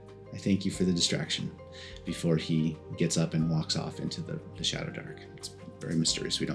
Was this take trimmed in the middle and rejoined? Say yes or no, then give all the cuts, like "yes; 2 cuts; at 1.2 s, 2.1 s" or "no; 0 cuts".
no; 0 cuts